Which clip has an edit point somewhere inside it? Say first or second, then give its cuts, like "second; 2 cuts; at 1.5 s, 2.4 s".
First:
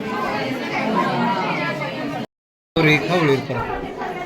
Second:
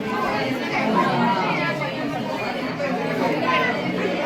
first; 1 cut; at 2.3 s